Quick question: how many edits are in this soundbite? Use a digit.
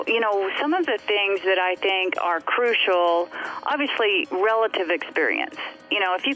0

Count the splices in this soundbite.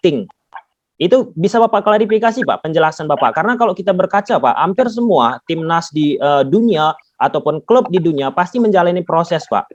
0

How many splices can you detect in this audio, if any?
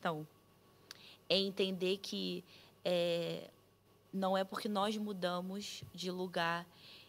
0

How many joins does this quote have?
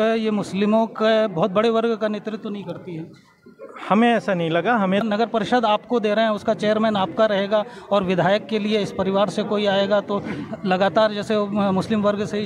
1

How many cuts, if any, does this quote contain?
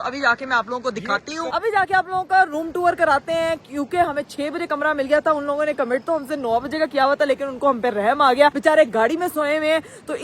0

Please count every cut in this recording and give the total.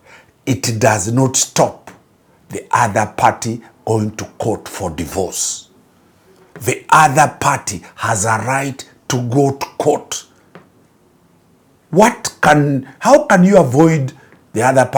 0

